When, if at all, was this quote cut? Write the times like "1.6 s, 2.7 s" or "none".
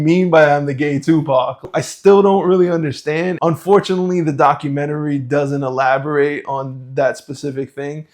1.6 s, 3.3 s